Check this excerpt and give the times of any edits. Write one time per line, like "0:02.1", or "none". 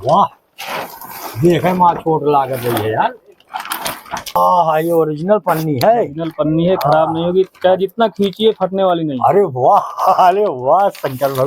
0:04.4